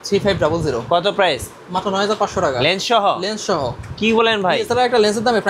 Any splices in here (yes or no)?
no